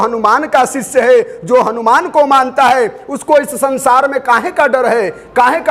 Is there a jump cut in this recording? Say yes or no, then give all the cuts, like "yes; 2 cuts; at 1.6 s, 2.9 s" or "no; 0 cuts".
no; 0 cuts